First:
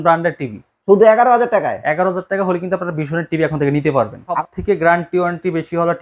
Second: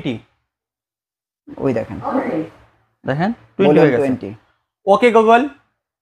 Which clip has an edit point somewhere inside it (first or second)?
first